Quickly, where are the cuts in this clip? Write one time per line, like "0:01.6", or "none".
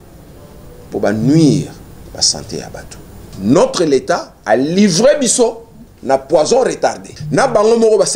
0:03.3
0:07.1